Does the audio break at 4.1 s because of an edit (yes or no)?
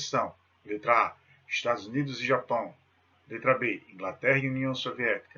yes